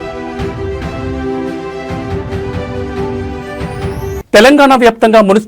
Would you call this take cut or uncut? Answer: uncut